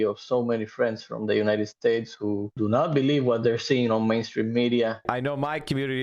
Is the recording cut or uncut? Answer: cut